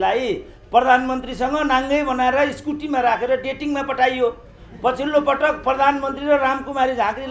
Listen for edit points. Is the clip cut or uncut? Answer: uncut